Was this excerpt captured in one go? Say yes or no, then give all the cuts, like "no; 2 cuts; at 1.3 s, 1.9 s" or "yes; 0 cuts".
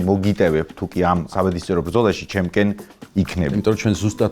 no; 2 cuts; at 1.3 s, 3.5 s